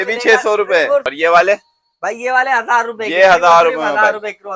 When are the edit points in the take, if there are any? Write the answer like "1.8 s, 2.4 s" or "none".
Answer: 1.1 s